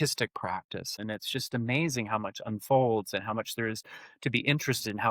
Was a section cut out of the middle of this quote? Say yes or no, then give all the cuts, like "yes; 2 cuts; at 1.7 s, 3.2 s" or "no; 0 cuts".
yes; 1 cut; at 1.0 s